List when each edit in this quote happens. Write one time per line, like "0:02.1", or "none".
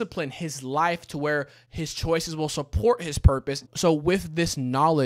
0:03.6